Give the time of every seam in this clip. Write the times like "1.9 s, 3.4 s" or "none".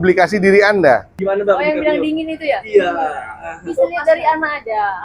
1.1 s

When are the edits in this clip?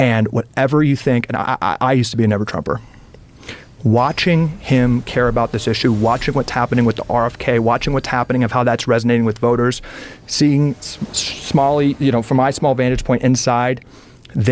10.2 s

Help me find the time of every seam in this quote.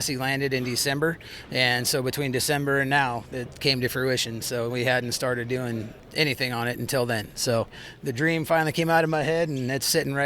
6.0 s, 7.8 s

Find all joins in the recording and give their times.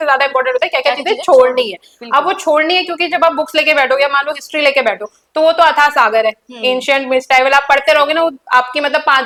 none

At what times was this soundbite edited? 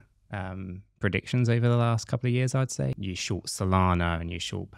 3.0 s

